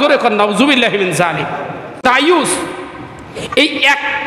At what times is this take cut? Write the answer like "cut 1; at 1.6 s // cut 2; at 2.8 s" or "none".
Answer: cut 1; at 2.0 s